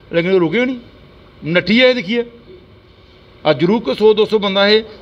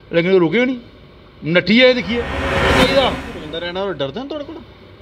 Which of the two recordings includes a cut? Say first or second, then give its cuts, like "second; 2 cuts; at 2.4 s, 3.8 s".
second; 1 cut; at 2.8 s